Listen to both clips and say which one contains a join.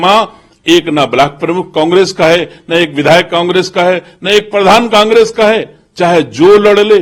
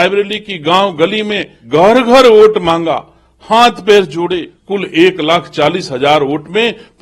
second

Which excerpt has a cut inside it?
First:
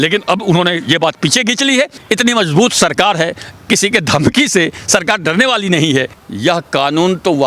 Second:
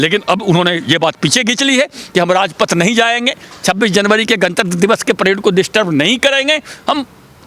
first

